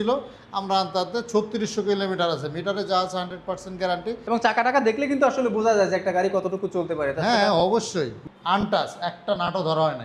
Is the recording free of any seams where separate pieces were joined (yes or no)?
no